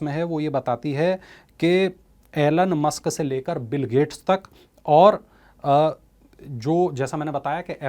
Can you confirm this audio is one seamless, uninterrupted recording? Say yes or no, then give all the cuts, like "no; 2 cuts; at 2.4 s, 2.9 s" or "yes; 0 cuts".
yes; 0 cuts